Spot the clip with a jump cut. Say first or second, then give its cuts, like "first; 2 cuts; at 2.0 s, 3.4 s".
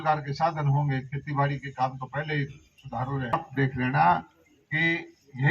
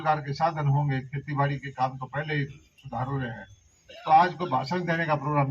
first; 1 cut; at 3.5 s